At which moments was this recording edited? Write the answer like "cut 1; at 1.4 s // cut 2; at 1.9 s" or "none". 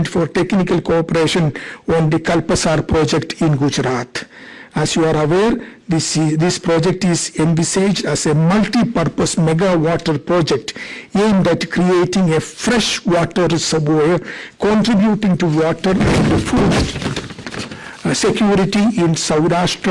none